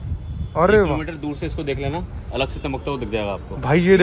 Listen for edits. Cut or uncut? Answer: uncut